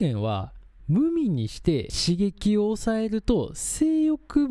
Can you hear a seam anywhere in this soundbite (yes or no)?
yes